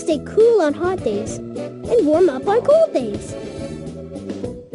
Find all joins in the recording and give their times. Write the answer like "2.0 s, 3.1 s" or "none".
3.1 s